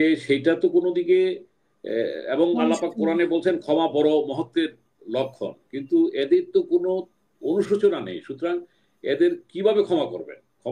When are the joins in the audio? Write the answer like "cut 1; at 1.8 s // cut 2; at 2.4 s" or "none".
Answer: none